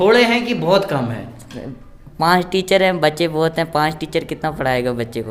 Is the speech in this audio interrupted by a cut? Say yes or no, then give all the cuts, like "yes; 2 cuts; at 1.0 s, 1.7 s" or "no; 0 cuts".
no; 0 cuts